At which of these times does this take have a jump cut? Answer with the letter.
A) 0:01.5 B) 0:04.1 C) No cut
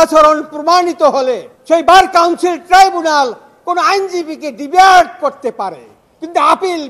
A